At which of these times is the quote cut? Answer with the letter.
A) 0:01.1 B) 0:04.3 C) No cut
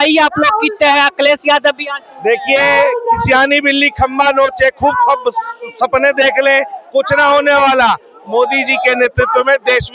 C